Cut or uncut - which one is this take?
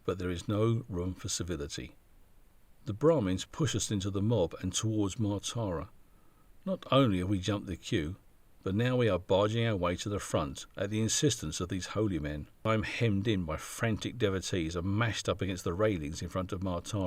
cut